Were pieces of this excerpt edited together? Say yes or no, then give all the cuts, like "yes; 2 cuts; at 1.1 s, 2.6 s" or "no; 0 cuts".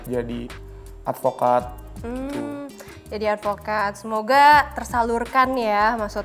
no; 0 cuts